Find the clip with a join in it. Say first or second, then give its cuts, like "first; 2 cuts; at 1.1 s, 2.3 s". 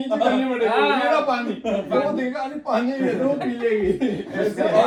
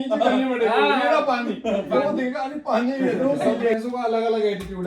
second; 1 cut; at 3.6 s